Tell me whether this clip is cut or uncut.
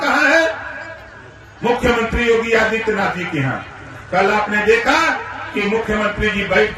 uncut